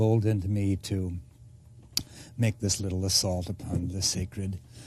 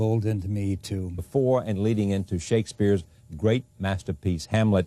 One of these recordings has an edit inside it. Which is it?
first; 1 cut; at 1.2 s

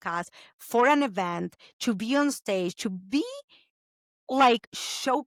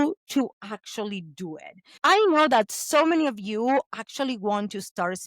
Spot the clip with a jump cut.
second; 1 cut; at 2.0 s

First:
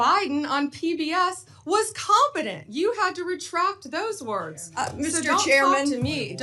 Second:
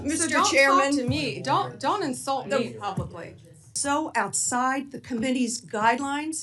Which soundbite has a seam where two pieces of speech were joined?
second; 1 cut; at 3.7 s

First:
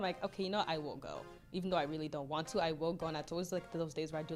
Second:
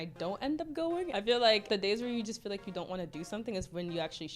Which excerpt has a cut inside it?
second; 2 cuts; at 1.1 s, 1.6 s

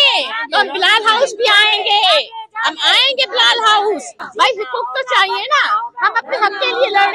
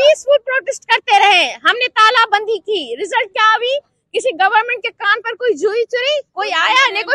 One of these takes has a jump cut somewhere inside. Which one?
first; 1 cut; at 4.2 s

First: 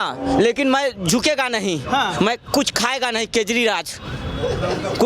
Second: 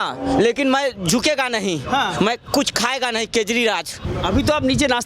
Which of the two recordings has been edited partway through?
second; 1 cut; at 4.0 s

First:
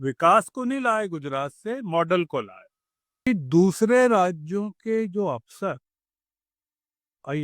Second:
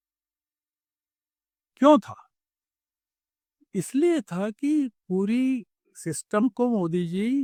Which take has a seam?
first; 1 cut; at 3.3 s

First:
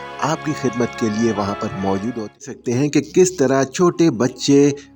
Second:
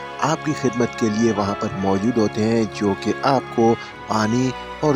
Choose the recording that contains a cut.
first; 1 cut; at 2.5 s

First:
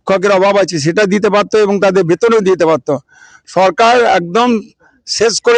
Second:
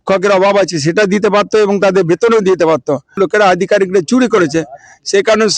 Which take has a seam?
second; 1 cut; at 3.2 s

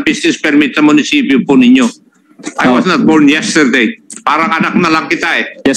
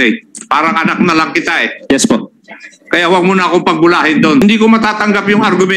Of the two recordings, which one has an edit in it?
second; 1 cut; at 4.4 s

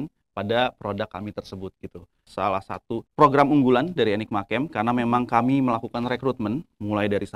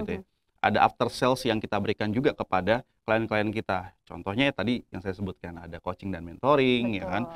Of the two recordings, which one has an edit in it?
first; 2 cuts; at 2.3 s, 3.1 s

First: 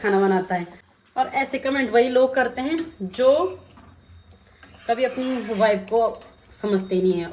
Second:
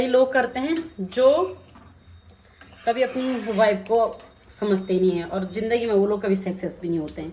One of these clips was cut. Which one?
first; 1 cut; at 1.0 s

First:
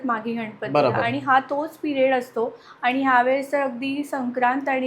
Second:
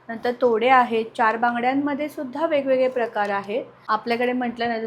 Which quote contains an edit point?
second; 1 cut; at 3.7 s

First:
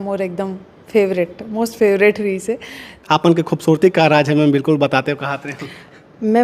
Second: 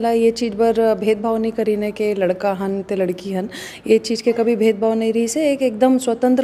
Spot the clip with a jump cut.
first; 1 cut; at 3.1 s

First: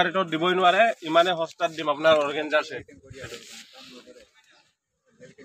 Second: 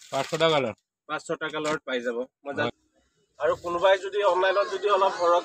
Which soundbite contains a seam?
second; 1 cut; at 2.7 s

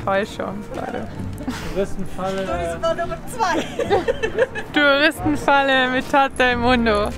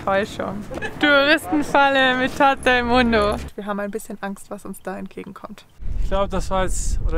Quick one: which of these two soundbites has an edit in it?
second; 3 cuts; at 0.8 s, 3.5 s, 6.0 s

